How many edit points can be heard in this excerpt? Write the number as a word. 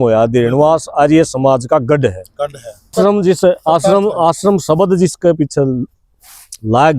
one